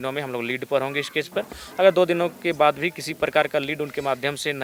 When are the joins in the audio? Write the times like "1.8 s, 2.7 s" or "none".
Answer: none